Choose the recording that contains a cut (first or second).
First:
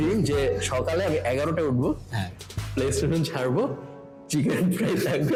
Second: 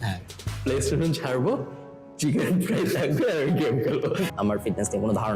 second